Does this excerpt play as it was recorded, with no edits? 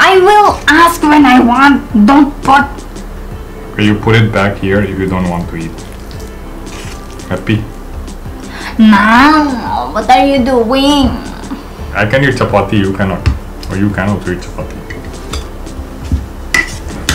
yes; 0 cuts

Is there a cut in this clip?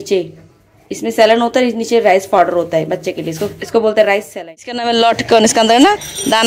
yes; 1 cut; at 4.3 s

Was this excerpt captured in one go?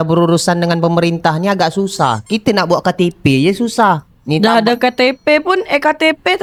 yes; 0 cuts

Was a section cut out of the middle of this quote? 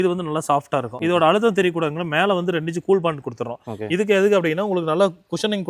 yes; 1 cut; at 0.9 s

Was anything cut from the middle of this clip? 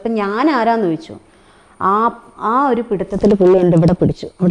no; 0 cuts

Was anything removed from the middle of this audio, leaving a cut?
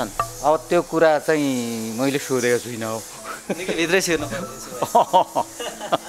no; 0 cuts

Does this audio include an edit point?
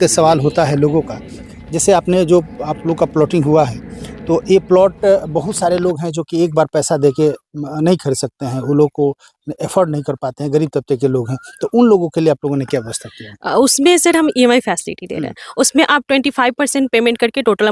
no; 0 cuts

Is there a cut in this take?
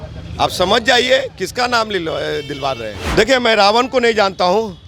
yes; 1 cut; at 3.0 s

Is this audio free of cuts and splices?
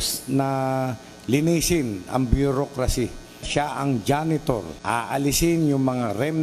no; 2 cuts; at 3.5 s, 4.7 s

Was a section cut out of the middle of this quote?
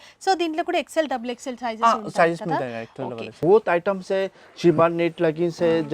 yes; 1 cut; at 3.3 s

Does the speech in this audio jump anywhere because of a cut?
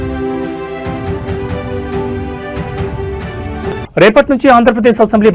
yes; 1 cut; at 3.5 s

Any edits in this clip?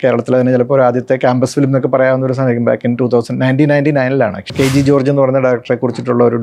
yes; 1 cut; at 4.5 s

